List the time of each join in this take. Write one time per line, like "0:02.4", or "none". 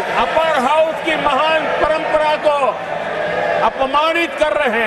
none